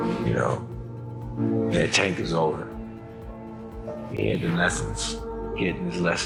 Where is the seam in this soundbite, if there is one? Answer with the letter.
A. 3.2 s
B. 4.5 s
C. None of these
C